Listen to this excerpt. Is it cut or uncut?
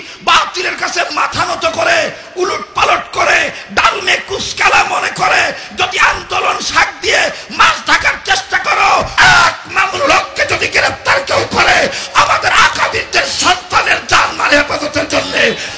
cut